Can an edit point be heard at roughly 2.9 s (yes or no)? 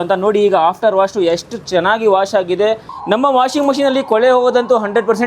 yes